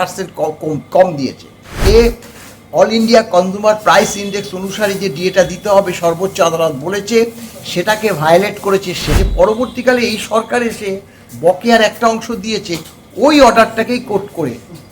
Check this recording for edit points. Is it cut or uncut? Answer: cut